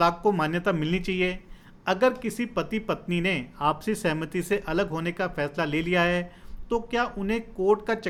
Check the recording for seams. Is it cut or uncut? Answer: uncut